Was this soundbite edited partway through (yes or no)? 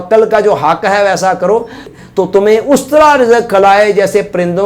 yes